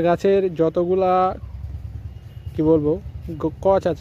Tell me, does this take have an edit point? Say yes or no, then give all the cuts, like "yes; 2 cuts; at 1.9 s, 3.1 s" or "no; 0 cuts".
no; 0 cuts